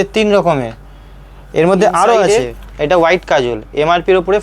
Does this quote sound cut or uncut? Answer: cut